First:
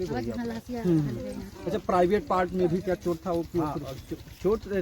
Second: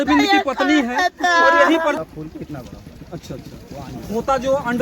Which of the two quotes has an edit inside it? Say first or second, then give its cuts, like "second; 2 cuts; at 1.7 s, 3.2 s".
second; 1 cut; at 2.0 s